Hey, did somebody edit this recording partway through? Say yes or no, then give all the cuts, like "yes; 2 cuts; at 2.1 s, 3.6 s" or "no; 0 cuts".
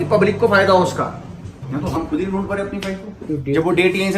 yes; 2 cuts; at 2.0 s, 3.3 s